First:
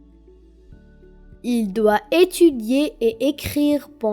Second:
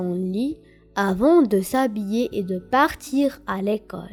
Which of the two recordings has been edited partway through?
first; 1 cut; at 1.4 s

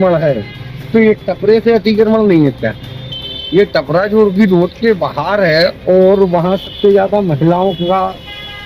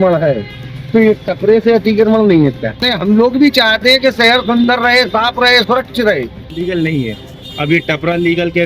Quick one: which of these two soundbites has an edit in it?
second; 2 cuts; at 2.9 s, 6.6 s

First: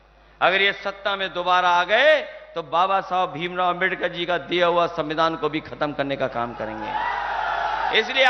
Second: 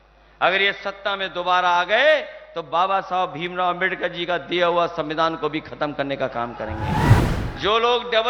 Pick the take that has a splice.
second; 1 cut; at 7.2 s

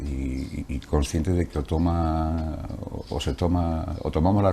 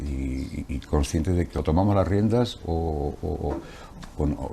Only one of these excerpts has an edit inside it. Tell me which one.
second; 1 cut; at 1.6 s

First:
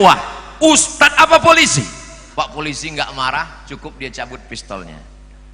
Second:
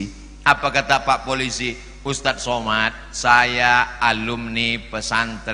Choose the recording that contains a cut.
first; 1 cut; at 2.2 s

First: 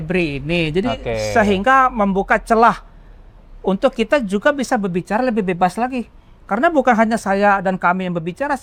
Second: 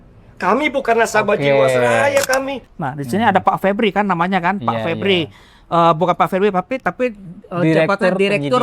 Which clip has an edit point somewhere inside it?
second; 1 cut; at 2.7 s

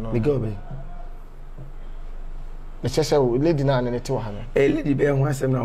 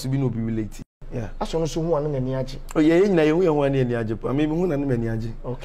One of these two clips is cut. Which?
second; 1 cut; at 0.9 s

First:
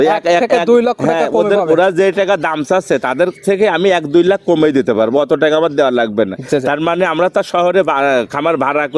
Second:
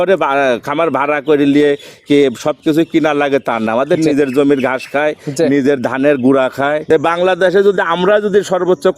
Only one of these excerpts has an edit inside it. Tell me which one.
second; 1 cut; at 6.9 s

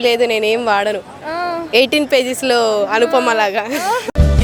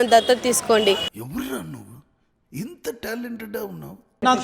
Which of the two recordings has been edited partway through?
second; 1 cut; at 1.0 s

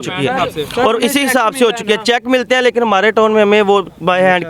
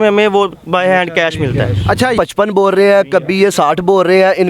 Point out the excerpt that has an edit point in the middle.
second; 1 cut; at 2.1 s

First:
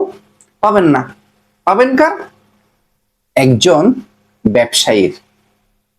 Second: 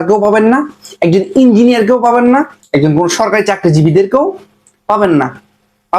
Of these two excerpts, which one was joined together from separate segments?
second; 1 cut; at 2.6 s

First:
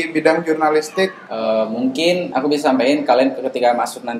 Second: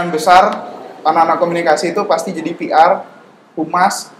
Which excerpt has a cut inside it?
first; 1 cut; at 1.2 s

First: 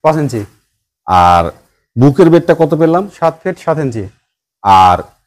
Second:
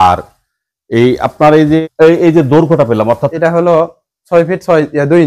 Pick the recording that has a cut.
second; 2 cuts; at 1.8 s, 3.3 s

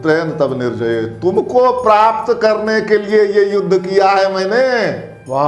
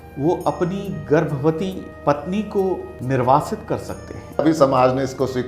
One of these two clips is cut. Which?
second; 3 cuts; at 1.9 s, 2.9 s, 4.4 s

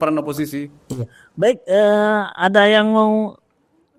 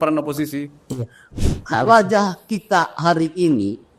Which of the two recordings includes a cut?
second; 1 cut; at 1.2 s

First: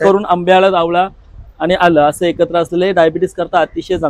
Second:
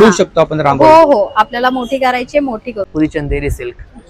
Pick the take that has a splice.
second; 1 cut; at 2.9 s

